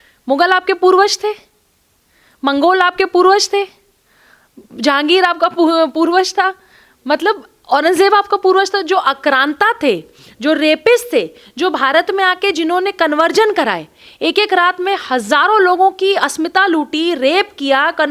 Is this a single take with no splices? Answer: yes; 0 cuts

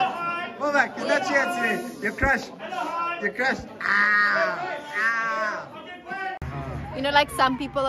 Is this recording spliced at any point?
yes; 1 cut; at 6.4 s

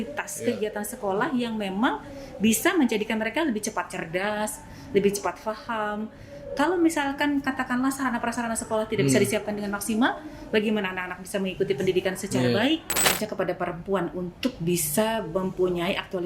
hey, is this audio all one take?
no; 1 cut; at 13.1 s

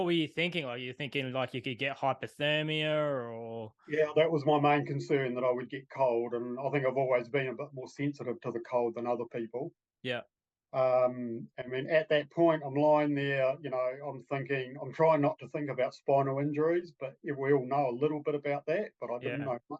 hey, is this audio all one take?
yes; 0 cuts

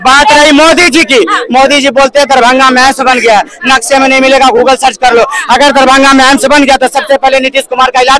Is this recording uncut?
yes; 0 cuts

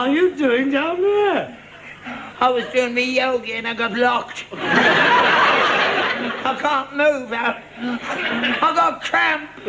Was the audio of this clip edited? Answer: no; 0 cuts

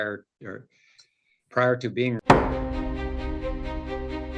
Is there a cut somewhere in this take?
yes; 1 cut; at 2.2 s

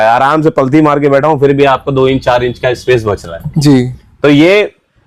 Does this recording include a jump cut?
no; 0 cuts

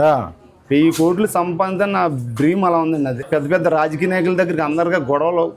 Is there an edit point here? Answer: yes; 1 cut; at 3.2 s

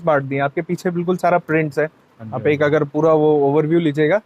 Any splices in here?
no; 0 cuts

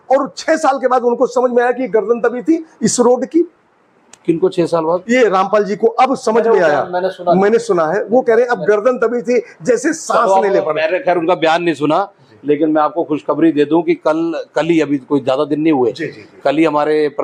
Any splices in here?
no; 0 cuts

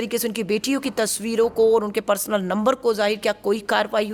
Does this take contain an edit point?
no; 0 cuts

